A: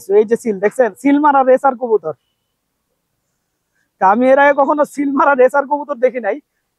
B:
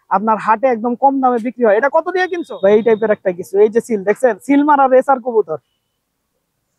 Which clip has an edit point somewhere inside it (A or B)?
B